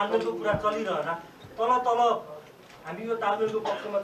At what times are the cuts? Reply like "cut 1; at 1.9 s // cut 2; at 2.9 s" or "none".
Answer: none